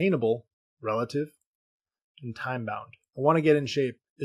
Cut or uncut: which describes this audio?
cut